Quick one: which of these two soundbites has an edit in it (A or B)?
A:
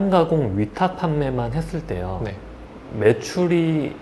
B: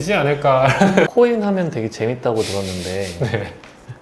B